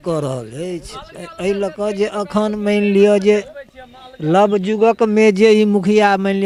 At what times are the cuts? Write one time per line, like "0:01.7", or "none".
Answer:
none